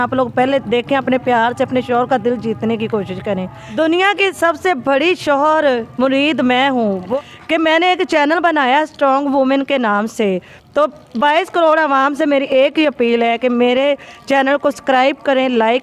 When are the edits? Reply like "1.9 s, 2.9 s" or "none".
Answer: 3.6 s, 7.1 s